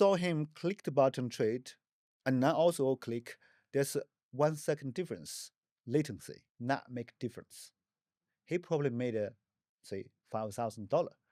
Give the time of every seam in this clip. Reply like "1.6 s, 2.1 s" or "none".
none